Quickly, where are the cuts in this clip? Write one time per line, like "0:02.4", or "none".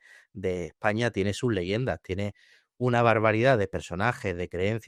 none

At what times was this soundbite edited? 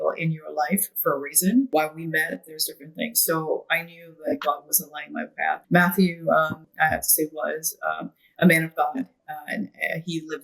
0:01.7
0:05.6
0:06.6

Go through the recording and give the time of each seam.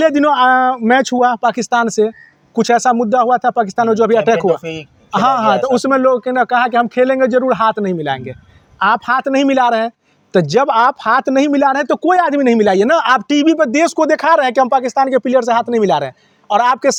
none

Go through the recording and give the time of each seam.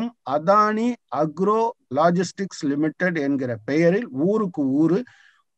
none

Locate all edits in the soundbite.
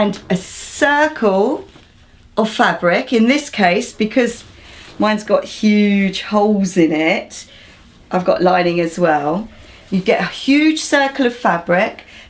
0:08.1

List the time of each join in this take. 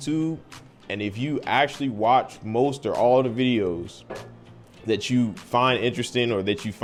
none

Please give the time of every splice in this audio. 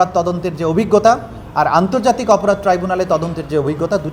none

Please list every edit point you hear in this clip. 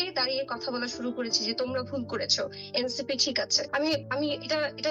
0:03.8

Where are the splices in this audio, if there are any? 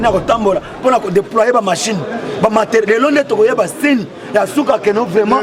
none

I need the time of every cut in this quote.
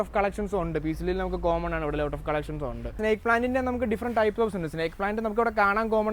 0:02.9

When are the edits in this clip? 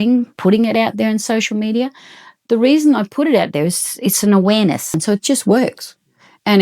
0:04.9

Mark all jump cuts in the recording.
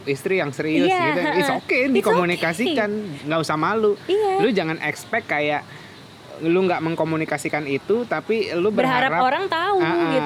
none

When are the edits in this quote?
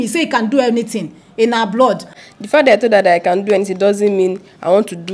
0:02.2

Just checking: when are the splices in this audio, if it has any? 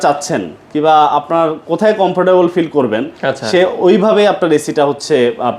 none

